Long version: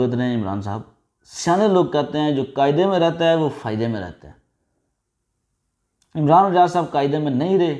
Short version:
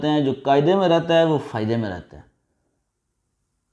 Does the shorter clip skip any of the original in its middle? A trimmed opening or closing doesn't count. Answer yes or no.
no